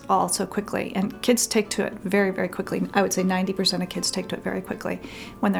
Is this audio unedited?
yes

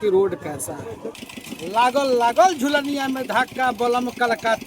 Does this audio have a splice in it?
yes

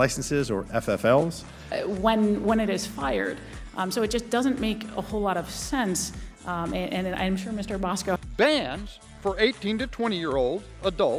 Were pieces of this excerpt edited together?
no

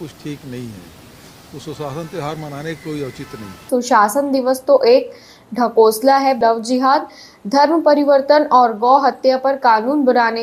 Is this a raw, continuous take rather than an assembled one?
no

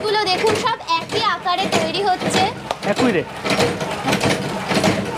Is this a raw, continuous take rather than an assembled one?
yes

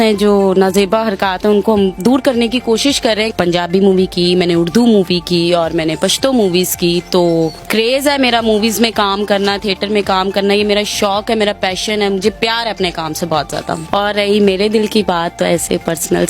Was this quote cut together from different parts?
yes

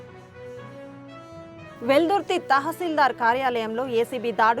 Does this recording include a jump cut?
yes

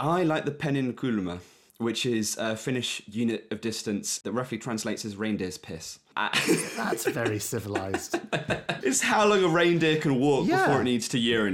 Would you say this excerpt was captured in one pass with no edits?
no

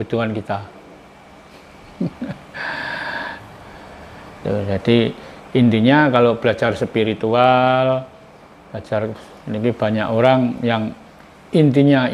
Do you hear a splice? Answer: no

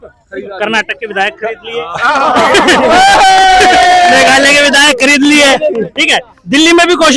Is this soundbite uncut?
yes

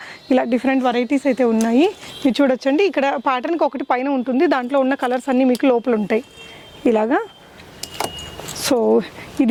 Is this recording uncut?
yes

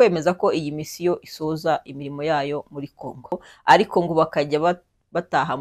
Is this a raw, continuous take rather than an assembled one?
no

